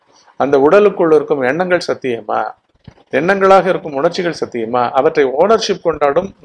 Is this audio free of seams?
yes; 0 cuts

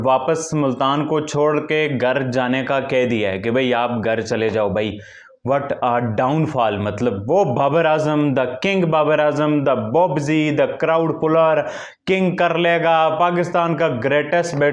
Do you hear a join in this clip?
no; 0 cuts

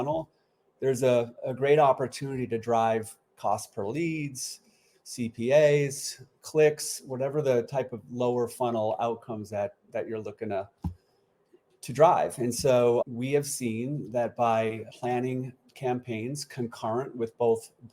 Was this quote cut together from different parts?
no; 0 cuts

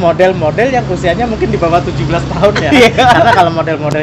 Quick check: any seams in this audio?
no; 0 cuts

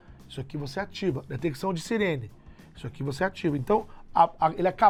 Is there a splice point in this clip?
no; 0 cuts

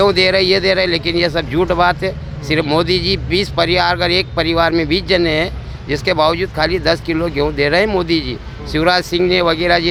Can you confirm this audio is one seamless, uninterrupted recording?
yes; 0 cuts

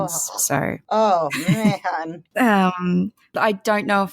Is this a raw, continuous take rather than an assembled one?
no; 3 cuts; at 0.8 s, 2.2 s, 3.3 s

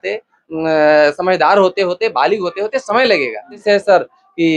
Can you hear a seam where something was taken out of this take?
yes; 1 cut; at 3.6 s

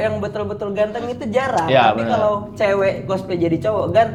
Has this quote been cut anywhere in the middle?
no; 0 cuts

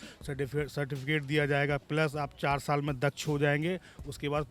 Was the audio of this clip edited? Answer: no; 0 cuts

